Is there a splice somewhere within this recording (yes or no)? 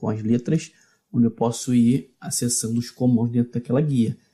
yes